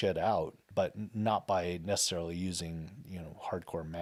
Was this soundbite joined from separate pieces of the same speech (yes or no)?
no